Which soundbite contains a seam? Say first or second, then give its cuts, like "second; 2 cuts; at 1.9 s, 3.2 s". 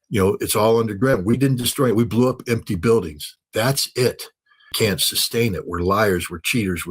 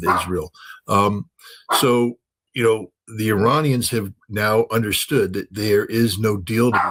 first; 1 cut; at 4.6 s